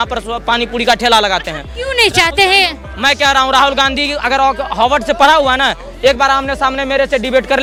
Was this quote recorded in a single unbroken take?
yes; 0 cuts

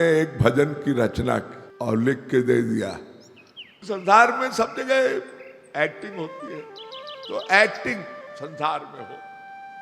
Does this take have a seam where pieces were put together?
yes; 1 cut; at 3.8 s

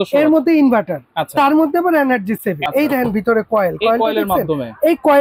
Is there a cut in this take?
yes; 1 cut; at 2.6 s

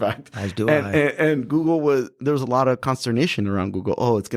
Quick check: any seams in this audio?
no; 0 cuts

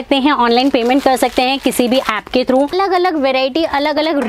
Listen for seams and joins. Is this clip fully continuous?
no; 1 cut; at 2.7 s

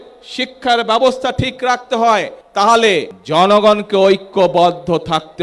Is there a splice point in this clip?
yes; 2 cuts; at 2.4 s, 3.2 s

